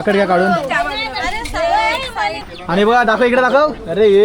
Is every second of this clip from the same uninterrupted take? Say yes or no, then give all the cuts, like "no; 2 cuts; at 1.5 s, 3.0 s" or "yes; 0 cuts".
no; 1 cut; at 2.4 s